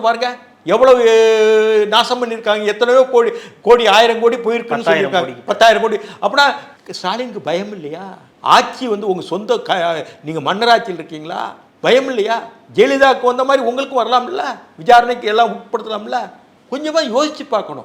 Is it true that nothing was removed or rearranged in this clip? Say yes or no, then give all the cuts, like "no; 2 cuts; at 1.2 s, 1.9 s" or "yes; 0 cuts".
yes; 0 cuts